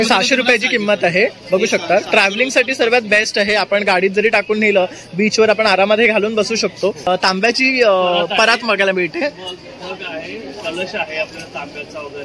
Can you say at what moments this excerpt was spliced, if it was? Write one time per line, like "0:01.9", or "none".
0:07.0

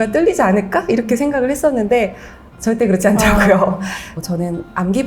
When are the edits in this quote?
0:04.0

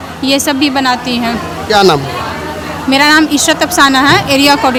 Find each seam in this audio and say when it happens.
none

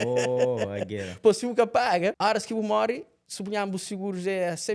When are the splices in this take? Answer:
0:02.2

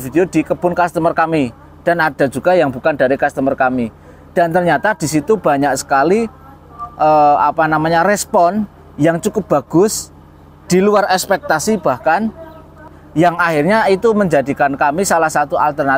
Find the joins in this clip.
0:13.0

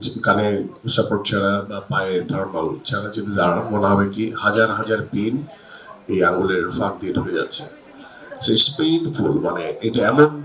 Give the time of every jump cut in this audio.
none

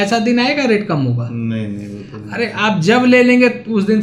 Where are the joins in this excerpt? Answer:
none

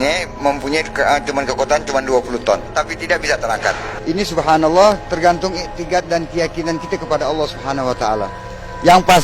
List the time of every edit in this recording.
0:03.9

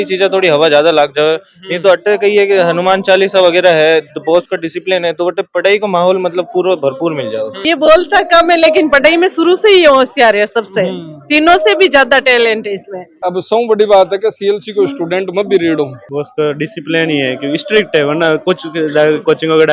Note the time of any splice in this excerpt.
0:07.6
0:13.2
0:16.0

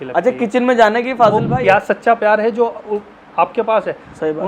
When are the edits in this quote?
0:01.4

